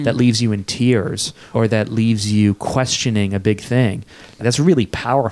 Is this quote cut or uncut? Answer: cut